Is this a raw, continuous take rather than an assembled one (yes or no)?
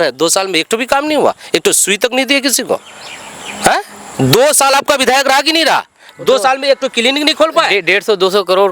yes